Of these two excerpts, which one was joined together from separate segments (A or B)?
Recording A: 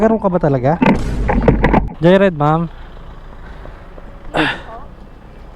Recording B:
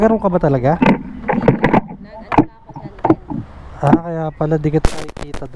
A